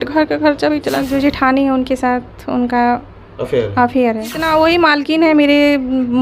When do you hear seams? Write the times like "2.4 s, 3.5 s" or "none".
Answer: 1.1 s, 4.4 s

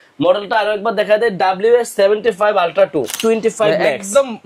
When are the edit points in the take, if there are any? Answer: 3.2 s

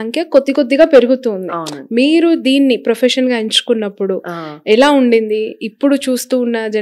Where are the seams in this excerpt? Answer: none

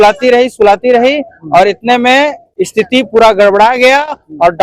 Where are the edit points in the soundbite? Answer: none

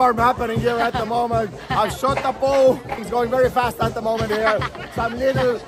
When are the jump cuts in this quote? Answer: 3.1 s

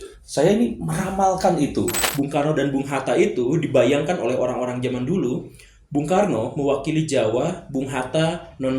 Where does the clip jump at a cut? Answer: 2.0 s

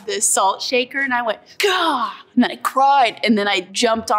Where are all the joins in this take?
1.7 s

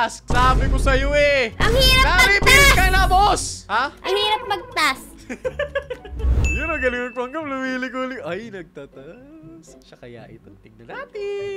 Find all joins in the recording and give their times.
6.4 s

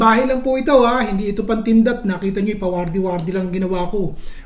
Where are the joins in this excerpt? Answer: none

